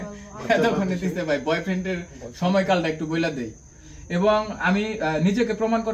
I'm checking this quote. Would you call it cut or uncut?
cut